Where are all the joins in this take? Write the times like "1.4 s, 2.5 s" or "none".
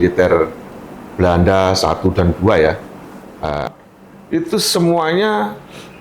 3.6 s